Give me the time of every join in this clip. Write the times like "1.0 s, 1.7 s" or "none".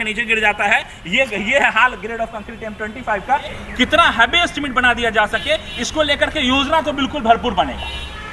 3.5 s